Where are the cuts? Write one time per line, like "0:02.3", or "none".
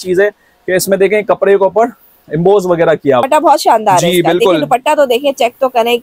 0:03.2

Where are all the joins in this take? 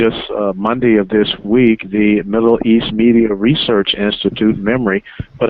0:01.8

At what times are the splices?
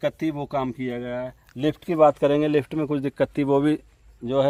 none

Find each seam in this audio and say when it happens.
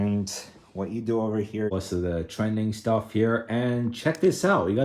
0:01.7

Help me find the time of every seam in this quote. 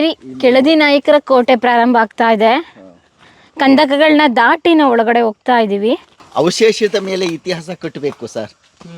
0:06.2

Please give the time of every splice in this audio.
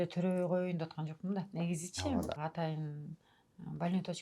0:02.4

